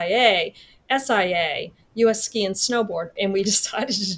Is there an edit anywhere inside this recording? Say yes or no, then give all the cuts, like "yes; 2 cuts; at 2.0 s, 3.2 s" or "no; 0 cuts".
yes; 1 cut; at 3.1 s